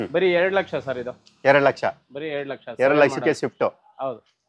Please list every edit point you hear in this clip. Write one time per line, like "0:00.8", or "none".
none